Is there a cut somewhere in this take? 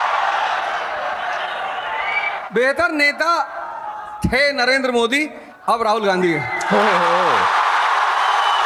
no; 0 cuts

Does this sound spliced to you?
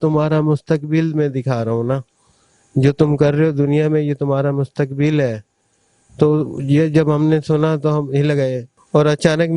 no; 0 cuts

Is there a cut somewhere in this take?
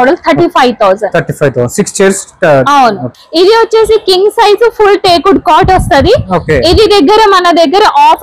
yes; 1 cut; at 3.1 s

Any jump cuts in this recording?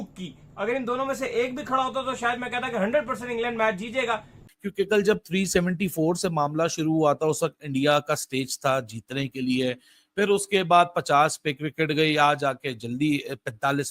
yes; 1 cut; at 4.3 s

